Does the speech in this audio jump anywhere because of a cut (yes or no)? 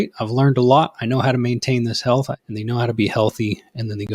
yes